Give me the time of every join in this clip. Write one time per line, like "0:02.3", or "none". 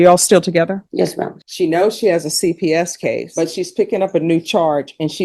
0:01.0